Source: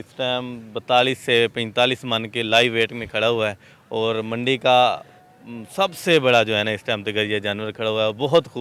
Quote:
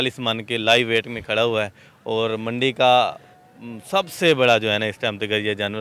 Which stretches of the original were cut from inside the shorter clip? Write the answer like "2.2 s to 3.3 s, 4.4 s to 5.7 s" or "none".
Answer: none